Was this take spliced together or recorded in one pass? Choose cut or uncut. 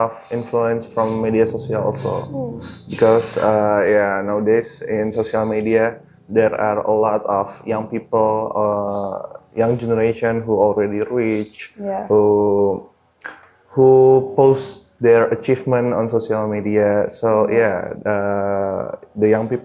uncut